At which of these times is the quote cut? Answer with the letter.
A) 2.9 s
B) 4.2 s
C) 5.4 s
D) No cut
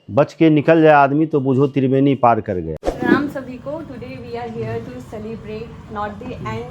A